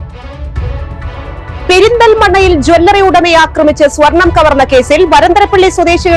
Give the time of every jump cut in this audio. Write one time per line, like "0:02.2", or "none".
0:01.5

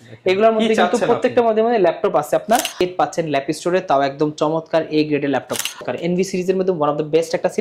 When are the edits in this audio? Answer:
0:02.8
0:05.8

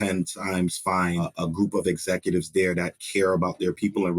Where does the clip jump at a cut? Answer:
0:01.3

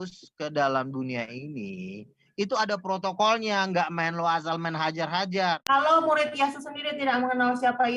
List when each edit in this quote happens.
0:05.6

